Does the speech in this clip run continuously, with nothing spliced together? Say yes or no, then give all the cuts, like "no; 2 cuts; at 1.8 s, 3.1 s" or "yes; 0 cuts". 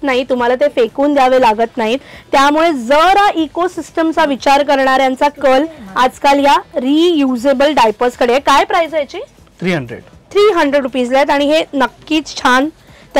yes; 0 cuts